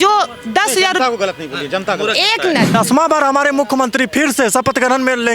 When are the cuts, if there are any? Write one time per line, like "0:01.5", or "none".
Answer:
0:02.7